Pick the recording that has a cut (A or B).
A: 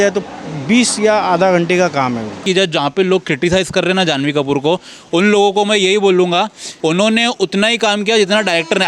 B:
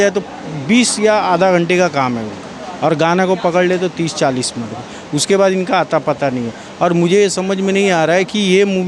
A